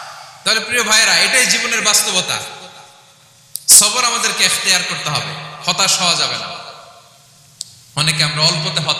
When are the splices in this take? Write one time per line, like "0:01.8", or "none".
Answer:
none